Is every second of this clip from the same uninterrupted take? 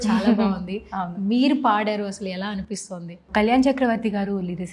yes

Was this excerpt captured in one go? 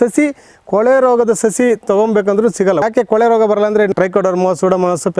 no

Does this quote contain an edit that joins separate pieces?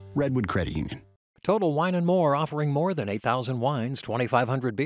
yes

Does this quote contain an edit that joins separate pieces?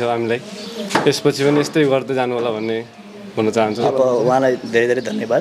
yes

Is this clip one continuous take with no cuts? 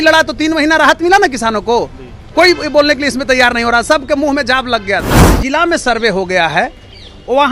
no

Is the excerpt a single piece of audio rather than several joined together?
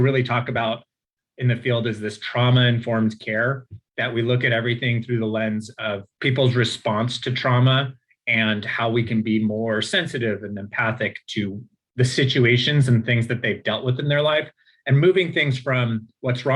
no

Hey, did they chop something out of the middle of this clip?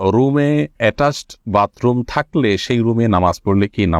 no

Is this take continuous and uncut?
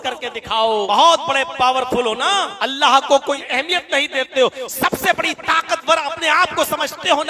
no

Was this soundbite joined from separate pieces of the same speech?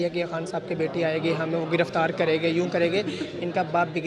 no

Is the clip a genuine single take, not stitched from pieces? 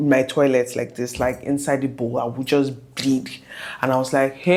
yes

